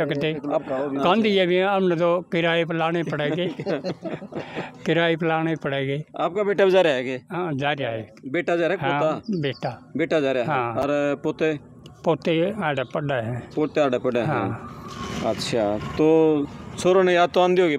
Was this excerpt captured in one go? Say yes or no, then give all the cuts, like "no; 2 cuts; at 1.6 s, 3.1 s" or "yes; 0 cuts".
yes; 0 cuts